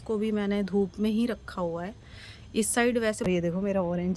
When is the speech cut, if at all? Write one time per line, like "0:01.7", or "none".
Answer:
0:03.3